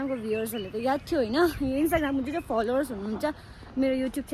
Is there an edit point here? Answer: no; 0 cuts

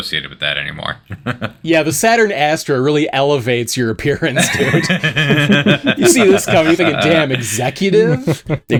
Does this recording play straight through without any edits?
yes; 0 cuts

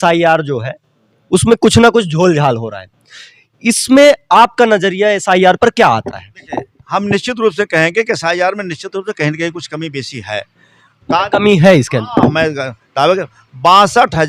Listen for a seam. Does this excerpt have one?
no; 0 cuts

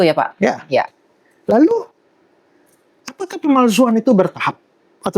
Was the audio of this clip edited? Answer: no; 0 cuts

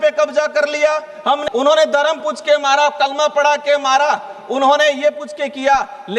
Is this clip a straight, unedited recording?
no; 1 cut; at 1.4 s

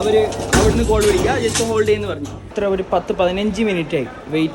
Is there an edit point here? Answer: yes; 1 cut; at 2.5 s

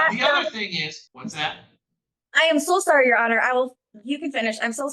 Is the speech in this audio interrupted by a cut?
yes; 1 cut; at 1.0 s

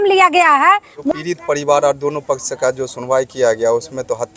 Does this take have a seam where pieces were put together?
yes; 1 cut; at 0.9 s

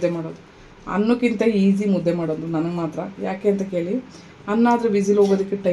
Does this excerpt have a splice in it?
no; 0 cuts

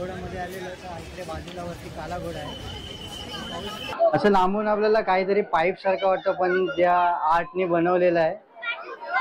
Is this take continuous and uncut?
no; 1 cut; at 3.9 s

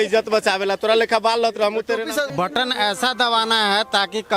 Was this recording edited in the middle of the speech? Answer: yes; 1 cut; at 2.3 s

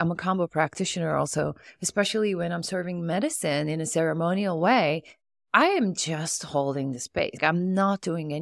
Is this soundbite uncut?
no; 1 cut; at 7.4 s

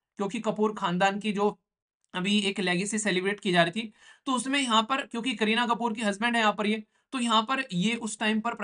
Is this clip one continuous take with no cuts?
yes; 0 cuts

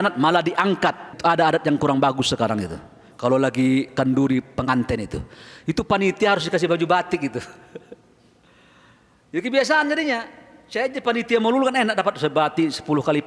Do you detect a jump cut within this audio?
yes; 1 cut; at 1.1 s

